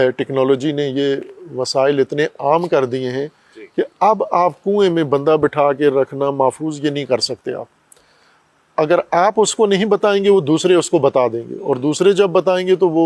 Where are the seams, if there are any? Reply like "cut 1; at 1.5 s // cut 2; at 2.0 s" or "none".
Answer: none